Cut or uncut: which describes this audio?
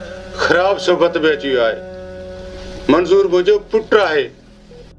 uncut